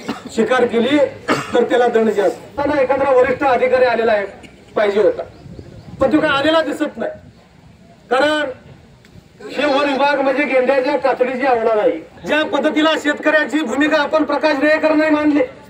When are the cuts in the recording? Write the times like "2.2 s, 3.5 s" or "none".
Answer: 2.6 s, 12.1 s